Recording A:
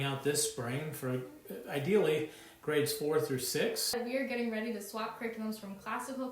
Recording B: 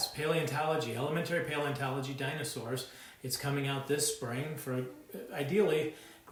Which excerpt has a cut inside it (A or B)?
A